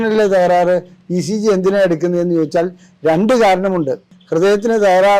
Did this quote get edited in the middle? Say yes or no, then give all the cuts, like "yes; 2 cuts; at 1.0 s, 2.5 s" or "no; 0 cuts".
yes; 1 cut; at 4.1 s